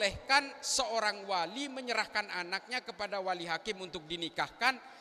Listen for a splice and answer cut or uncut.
uncut